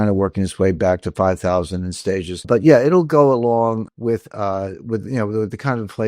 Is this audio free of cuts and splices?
no; 2 cuts; at 2.4 s, 3.9 s

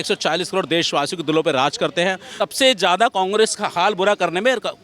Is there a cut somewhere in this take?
yes; 1 cut; at 2.3 s

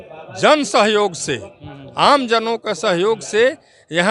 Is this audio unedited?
yes; 0 cuts

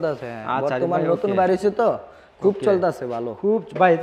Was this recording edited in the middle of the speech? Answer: no; 0 cuts

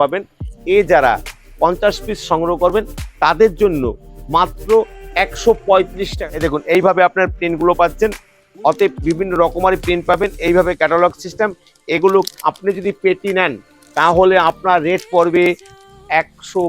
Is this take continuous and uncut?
no; 1 cut; at 6.1 s

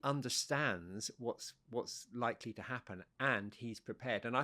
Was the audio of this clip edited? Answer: no; 0 cuts

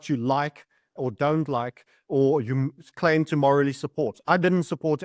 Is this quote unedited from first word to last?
no; 1 cut; at 0.9 s

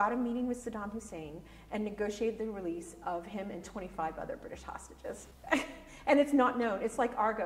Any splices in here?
no; 0 cuts

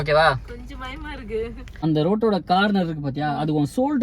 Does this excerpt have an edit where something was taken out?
yes; 1 cut; at 1.8 s

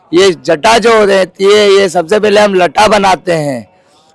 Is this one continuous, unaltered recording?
yes; 0 cuts

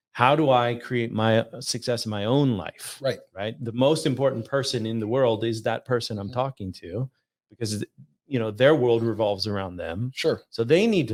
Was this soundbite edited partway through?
no; 0 cuts

